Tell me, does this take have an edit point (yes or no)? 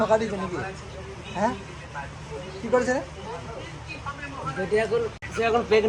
no